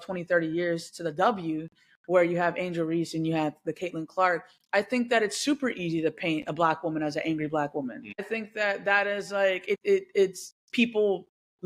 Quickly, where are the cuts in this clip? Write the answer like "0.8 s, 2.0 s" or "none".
8.3 s, 9.8 s

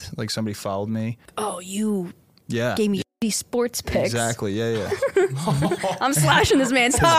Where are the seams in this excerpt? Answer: 1.2 s

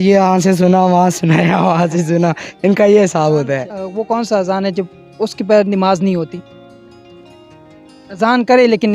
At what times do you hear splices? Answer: 3.8 s

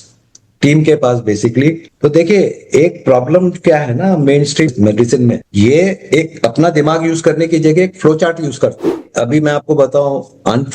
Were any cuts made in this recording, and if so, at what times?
9.0 s

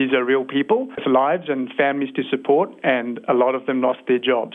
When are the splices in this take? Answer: 1.0 s

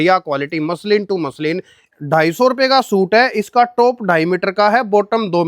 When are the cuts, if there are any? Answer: 1.9 s

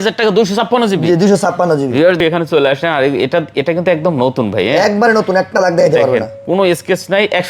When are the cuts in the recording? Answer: 2.2 s

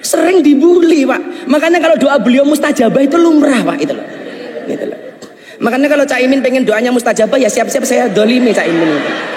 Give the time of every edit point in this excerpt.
none

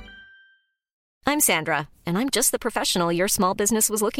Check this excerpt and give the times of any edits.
1.1 s

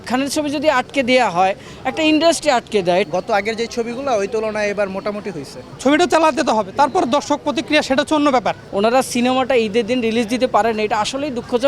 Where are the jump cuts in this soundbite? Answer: 3.0 s, 5.7 s, 8.6 s

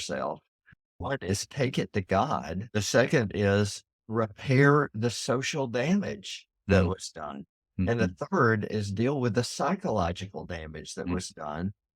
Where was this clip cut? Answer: 2.6 s

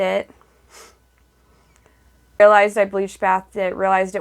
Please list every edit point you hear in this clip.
2.4 s

